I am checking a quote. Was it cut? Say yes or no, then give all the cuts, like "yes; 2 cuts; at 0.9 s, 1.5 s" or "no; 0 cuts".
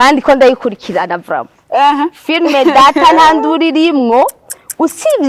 no; 0 cuts